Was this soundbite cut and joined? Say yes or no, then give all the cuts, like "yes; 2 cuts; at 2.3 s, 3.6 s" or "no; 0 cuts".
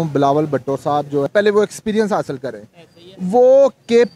yes; 1 cut; at 1.3 s